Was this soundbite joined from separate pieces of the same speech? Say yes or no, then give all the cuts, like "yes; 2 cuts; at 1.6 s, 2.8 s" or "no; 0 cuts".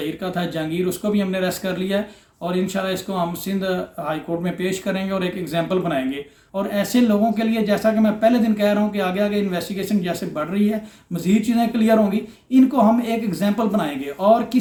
no; 0 cuts